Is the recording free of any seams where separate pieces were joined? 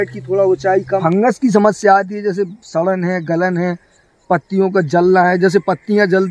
no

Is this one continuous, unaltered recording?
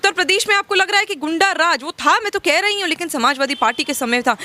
yes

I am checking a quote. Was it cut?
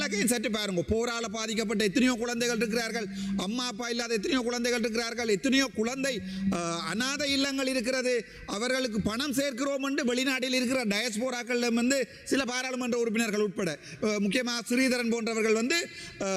no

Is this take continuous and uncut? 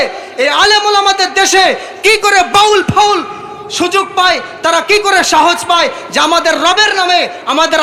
yes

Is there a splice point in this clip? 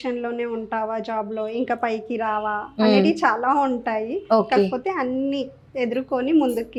no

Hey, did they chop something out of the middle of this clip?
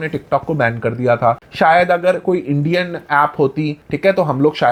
no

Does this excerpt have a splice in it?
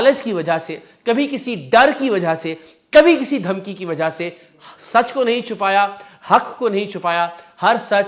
no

